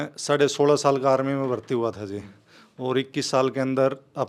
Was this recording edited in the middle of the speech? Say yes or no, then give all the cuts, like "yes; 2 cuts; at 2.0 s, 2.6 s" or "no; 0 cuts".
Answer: no; 0 cuts